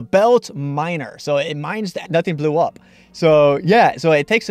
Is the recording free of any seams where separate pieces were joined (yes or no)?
yes